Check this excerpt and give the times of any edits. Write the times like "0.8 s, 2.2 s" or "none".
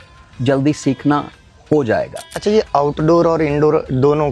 2.2 s